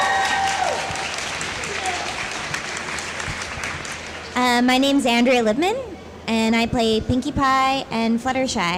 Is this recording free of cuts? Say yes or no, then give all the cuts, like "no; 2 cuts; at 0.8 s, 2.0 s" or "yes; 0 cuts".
yes; 0 cuts